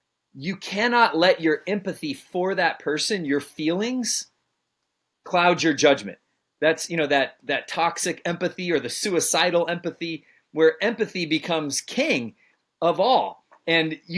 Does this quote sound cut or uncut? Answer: uncut